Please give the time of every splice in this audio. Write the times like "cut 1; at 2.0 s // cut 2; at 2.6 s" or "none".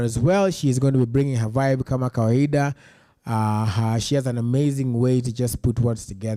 none